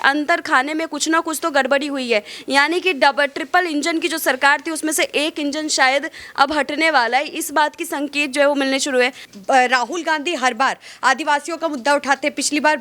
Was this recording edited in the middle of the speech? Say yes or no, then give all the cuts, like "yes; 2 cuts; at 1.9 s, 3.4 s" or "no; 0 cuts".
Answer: yes; 1 cut; at 9.3 s